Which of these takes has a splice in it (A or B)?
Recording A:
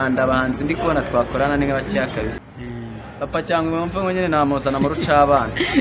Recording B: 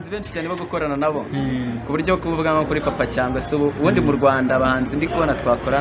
A